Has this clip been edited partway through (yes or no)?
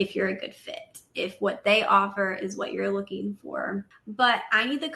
yes